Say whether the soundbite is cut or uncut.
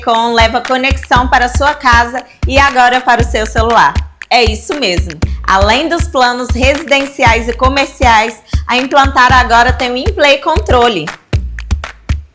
uncut